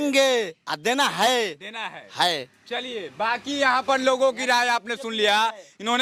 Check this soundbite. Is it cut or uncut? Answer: uncut